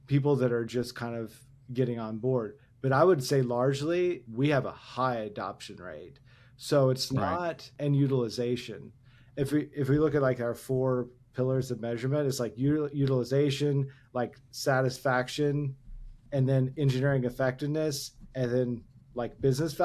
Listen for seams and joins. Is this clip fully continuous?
no; 3 cuts; at 4.3 s, 7.7 s, 16.2 s

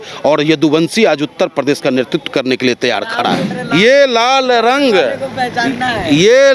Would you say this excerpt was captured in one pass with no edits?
no; 1 cut; at 3.6 s

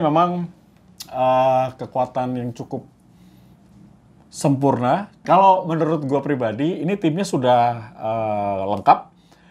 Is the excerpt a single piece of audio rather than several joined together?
no; 1 cut; at 5.2 s

